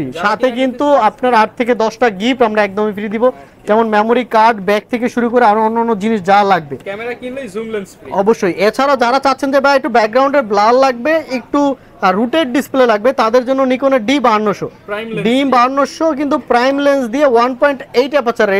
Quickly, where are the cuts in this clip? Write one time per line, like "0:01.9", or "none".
none